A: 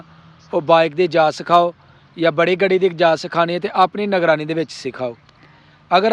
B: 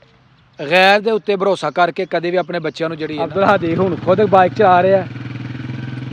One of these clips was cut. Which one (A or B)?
B